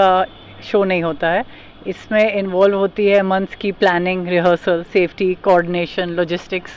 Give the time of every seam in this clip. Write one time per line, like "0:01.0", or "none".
none